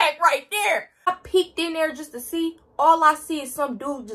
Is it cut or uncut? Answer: cut